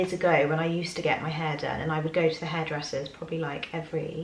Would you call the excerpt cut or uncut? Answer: uncut